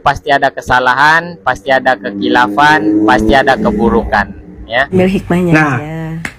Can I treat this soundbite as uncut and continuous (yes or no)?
no